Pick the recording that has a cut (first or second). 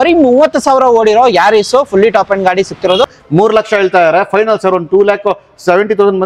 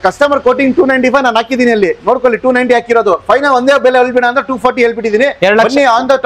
first